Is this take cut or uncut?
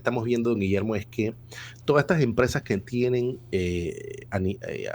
uncut